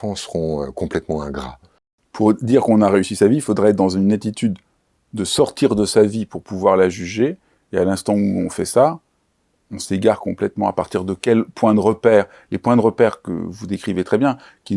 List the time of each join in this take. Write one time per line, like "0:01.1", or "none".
0:01.9

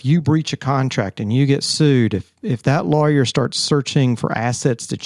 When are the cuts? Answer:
none

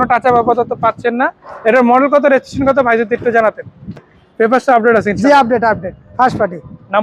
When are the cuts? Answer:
0:04.2

